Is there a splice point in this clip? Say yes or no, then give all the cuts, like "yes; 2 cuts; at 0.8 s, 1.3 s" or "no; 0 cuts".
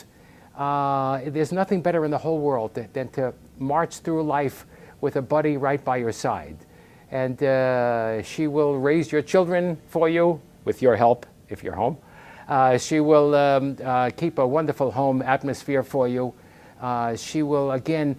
no; 0 cuts